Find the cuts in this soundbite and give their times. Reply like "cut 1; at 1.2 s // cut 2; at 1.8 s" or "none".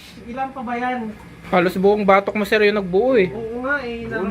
cut 1; at 1.3 s